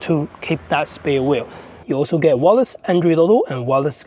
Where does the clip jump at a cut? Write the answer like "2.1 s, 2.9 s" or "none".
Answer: 1.8 s

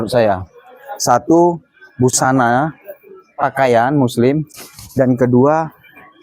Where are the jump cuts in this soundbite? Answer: none

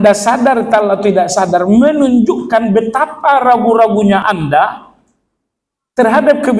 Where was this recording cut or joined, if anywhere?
4.2 s

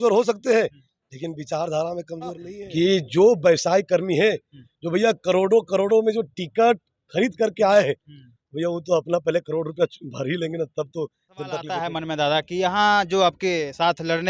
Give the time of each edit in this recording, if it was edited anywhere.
2.5 s, 11.7 s

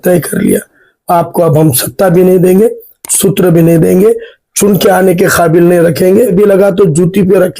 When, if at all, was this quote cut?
6.3 s

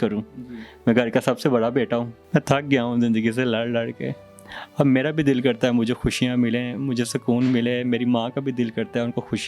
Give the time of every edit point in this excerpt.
2.2 s

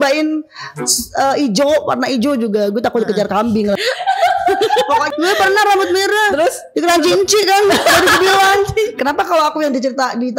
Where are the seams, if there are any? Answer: 3.7 s, 5.1 s, 9.0 s

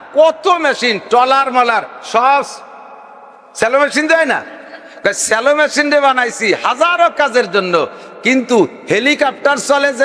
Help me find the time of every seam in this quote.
none

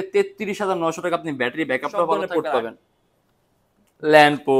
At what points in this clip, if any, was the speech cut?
2.3 s

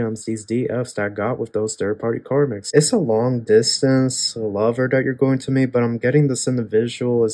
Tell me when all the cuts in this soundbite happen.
2.6 s

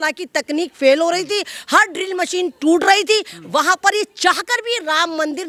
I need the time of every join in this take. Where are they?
none

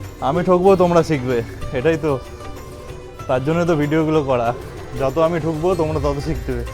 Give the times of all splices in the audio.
none

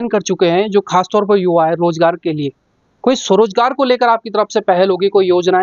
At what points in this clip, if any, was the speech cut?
none

